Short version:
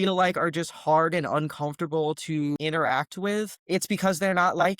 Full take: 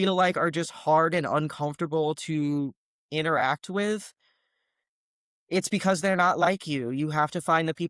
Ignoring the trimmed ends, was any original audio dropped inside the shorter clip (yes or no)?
yes